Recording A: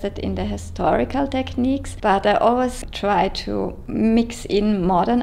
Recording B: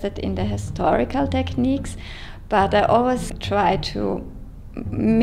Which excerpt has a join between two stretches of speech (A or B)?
A